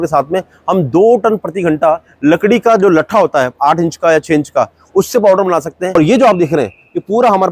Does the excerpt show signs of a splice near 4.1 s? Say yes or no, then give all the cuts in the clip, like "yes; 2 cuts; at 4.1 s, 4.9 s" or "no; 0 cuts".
no; 1 cut; at 5.9 s